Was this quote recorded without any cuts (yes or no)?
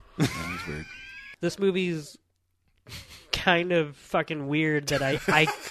no